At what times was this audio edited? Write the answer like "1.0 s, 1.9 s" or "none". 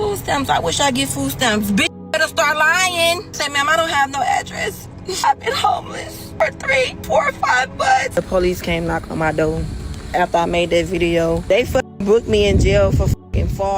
3.4 s, 5.2 s, 6.2 s, 7.0 s, 8.1 s, 11.4 s